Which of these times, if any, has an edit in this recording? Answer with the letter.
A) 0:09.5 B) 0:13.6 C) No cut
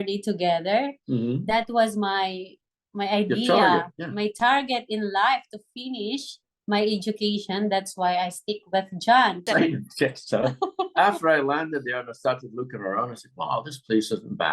A